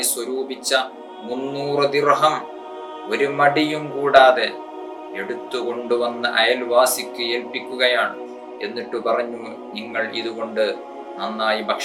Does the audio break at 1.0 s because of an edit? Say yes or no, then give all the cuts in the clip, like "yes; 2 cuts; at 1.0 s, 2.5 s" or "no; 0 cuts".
no; 0 cuts